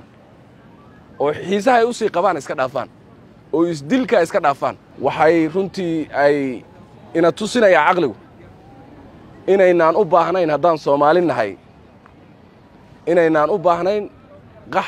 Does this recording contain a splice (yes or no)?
yes